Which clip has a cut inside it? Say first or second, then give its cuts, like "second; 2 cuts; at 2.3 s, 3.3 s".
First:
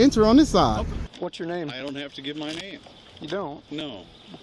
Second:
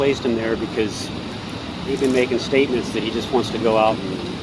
first; 1 cut; at 1.1 s